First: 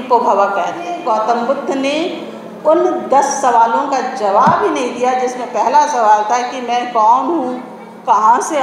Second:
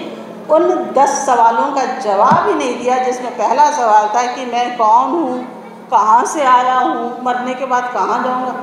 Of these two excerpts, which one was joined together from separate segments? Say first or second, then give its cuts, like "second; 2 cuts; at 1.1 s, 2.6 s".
first; 1 cut; at 0.9 s